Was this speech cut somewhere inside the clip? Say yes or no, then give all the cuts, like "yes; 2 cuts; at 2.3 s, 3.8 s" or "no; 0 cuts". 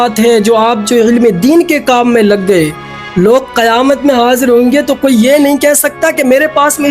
no; 0 cuts